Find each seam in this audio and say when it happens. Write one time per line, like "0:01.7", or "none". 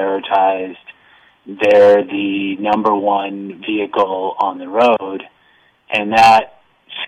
none

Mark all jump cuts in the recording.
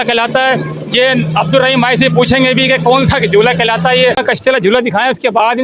0:04.2

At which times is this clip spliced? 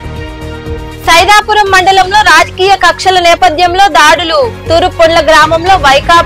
0:01.0

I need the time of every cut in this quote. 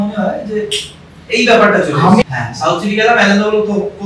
0:02.2

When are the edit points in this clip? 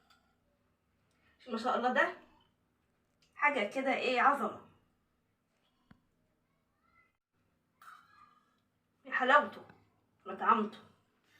0:07.3

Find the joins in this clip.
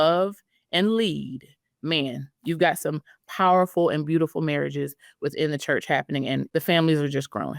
0:06.5

